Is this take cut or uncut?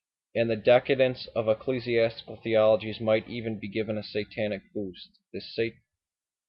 cut